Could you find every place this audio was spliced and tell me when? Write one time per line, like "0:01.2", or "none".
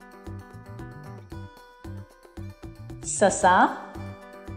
none